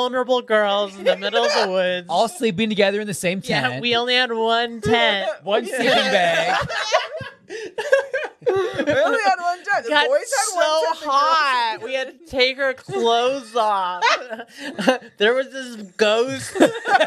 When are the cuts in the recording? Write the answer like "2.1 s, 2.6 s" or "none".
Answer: none